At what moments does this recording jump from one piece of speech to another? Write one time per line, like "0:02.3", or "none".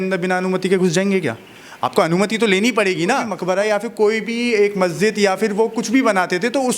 0:03.3

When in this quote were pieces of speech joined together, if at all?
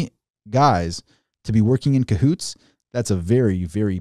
none

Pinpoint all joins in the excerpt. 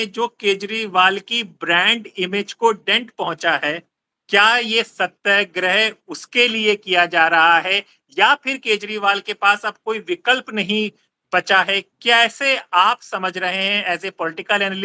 none

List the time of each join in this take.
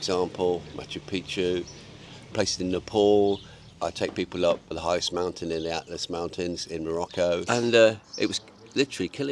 0:02.3
0:03.6
0:04.7
0:07.4

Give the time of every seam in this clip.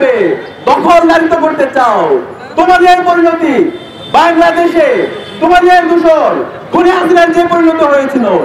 none

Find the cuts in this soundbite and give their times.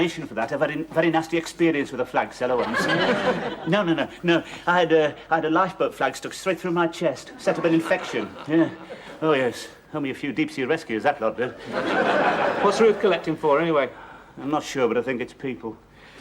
0:05.7

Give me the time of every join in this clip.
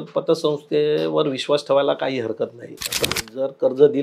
0:03.1

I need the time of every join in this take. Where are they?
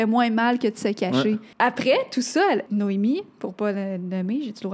0:01.5
0:02.7

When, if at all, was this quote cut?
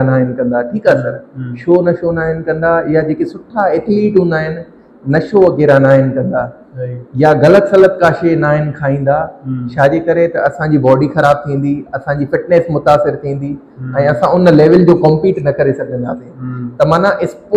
none

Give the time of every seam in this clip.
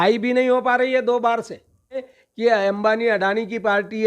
0:02.2

